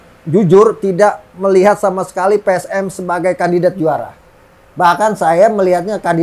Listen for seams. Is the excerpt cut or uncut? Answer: uncut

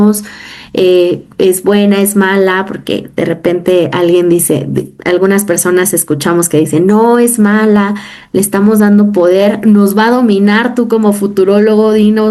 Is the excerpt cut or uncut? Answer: uncut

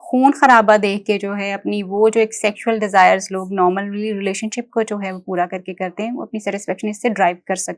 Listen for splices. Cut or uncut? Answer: uncut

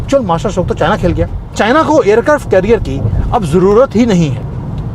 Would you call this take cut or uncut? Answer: cut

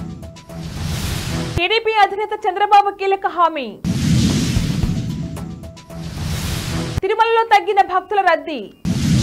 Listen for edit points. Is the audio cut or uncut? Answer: uncut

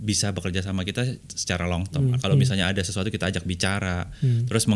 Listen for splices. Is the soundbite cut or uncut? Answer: cut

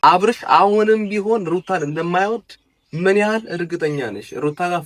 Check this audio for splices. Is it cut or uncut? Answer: uncut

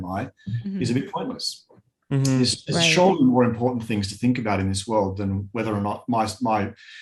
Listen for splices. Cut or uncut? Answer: uncut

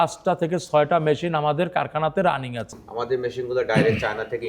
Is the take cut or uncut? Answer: cut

